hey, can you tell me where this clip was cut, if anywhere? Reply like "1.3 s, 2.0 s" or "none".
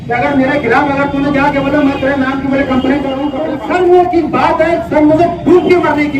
3.5 s